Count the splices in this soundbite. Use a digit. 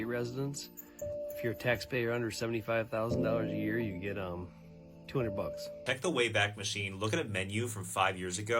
1